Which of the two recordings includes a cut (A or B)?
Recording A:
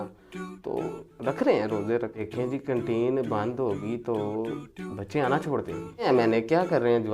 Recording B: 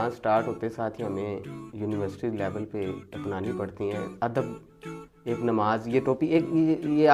A